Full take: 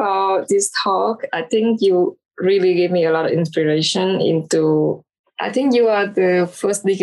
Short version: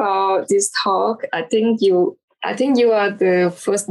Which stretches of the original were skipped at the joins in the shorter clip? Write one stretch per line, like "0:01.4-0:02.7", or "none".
0:02.2-0:05.2